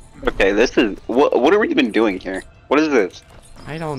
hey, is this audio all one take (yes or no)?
yes